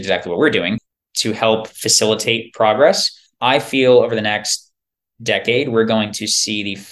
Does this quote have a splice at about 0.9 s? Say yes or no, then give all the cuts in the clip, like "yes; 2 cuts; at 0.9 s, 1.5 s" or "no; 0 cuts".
yes; 1 cut; at 0.9 s